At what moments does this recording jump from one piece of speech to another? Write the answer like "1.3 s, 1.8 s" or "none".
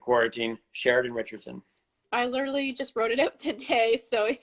1.8 s